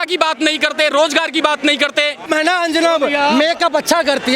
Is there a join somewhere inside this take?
yes; 1 cut; at 2.3 s

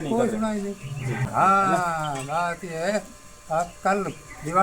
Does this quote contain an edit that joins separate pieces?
yes; 1 cut; at 1.3 s

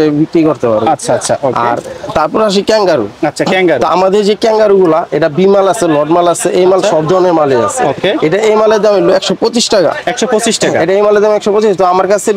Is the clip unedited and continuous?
yes; 0 cuts

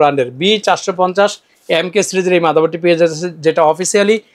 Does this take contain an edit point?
no; 0 cuts

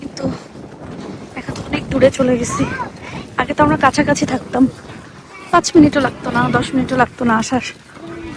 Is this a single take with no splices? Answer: yes; 0 cuts

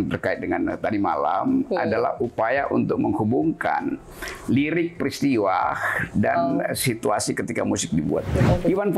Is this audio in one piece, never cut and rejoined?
yes; 0 cuts

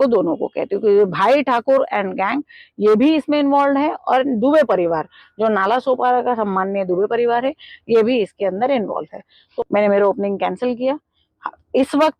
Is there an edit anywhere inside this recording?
yes; 1 cut; at 9.4 s

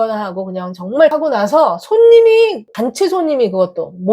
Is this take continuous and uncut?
no; 2 cuts; at 1.1 s, 2.6 s

